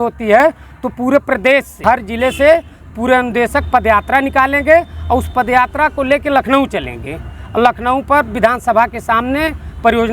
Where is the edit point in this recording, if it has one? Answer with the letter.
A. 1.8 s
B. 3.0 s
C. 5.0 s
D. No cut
A